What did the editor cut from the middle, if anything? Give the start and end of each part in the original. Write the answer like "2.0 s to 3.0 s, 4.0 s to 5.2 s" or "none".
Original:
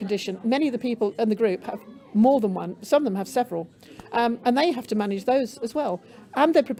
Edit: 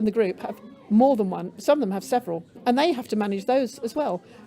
3.8 s to 4.4 s